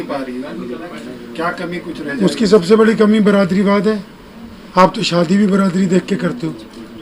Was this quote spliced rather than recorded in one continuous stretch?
no; 0 cuts

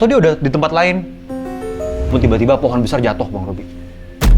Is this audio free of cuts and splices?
no; 1 cut; at 2.1 s

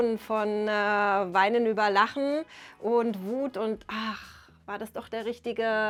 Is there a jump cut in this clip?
no; 0 cuts

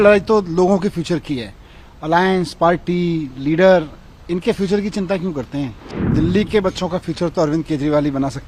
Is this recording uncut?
no; 1 cut; at 6.0 s

